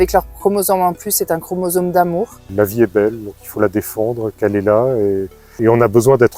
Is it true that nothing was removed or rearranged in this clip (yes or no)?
no